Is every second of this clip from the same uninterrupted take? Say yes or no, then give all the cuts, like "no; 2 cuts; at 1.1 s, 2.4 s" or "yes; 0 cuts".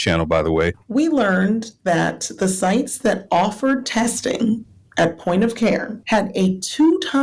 no; 2 cuts; at 0.8 s, 5.9 s